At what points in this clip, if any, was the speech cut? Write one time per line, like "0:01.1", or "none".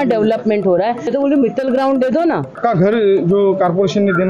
0:01.1
0:02.5